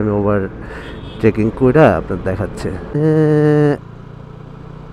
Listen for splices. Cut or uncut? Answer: cut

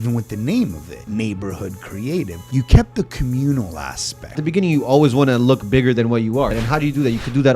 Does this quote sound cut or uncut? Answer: cut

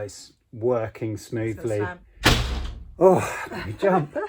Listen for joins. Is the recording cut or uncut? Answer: cut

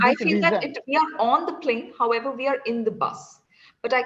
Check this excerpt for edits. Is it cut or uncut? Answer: uncut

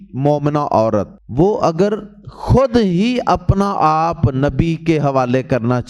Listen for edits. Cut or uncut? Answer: cut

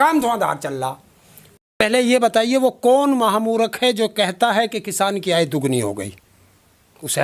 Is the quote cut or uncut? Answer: cut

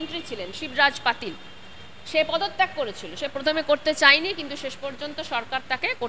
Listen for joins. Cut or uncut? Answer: uncut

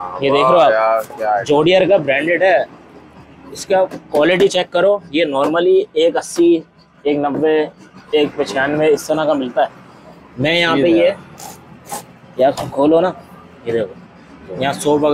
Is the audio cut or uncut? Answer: uncut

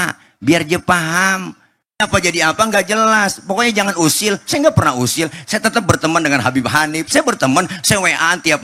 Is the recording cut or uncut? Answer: cut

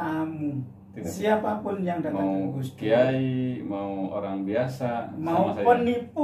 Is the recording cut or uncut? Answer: cut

